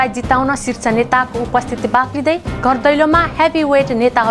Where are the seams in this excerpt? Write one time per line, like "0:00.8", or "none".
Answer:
none